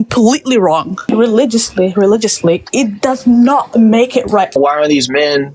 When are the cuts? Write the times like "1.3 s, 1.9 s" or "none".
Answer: 1.1 s, 4.6 s